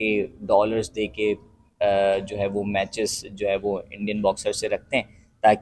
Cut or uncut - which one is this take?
uncut